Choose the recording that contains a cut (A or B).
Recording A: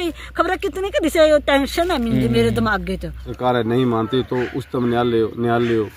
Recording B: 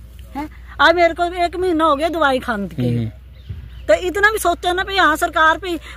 A